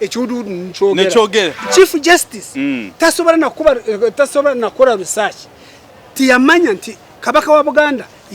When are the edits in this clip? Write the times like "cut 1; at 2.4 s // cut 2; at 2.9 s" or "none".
cut 1; at 1.6 s

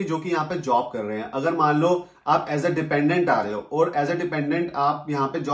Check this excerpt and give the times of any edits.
none

